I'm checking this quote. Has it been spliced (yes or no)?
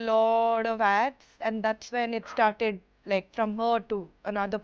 no